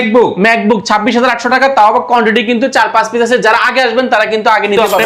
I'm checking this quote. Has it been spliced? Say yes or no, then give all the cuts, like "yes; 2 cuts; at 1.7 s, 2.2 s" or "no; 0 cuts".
no; 0 cuts